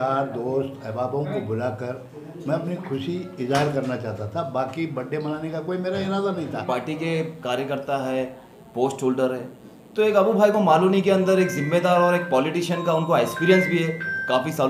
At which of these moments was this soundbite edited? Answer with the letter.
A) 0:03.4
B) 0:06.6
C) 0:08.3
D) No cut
B